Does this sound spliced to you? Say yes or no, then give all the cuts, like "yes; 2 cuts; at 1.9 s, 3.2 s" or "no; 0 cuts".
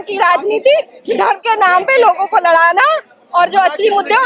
no; 0 cuts